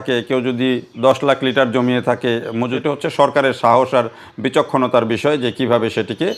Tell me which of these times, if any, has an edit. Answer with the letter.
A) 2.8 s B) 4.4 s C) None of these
A